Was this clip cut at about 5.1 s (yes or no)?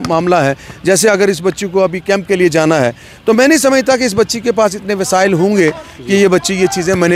no